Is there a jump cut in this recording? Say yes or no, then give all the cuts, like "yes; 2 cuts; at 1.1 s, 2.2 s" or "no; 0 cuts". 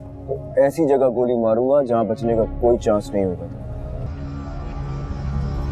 yes; 1 cut; at 4.0 s